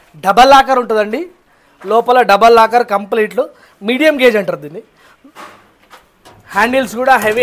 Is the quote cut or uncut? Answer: uncut